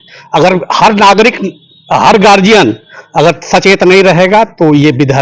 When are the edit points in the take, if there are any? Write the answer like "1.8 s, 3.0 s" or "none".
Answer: none